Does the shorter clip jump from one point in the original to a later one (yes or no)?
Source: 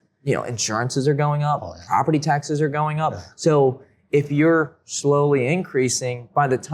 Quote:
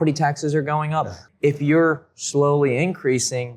yes